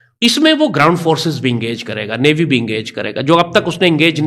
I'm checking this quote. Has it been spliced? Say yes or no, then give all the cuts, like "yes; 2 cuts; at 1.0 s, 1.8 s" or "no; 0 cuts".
no; 0 cuts